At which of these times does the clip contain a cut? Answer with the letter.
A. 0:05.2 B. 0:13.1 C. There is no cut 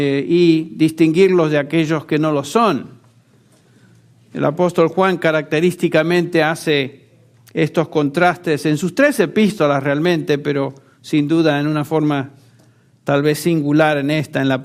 A